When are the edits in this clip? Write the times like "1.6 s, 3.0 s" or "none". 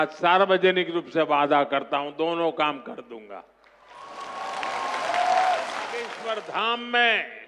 6.2 s